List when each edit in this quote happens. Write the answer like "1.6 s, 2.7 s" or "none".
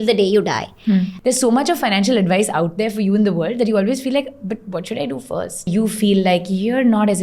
1.1 s, 5.7 s